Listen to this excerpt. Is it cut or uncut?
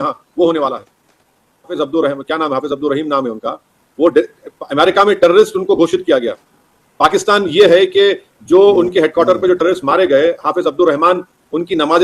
cut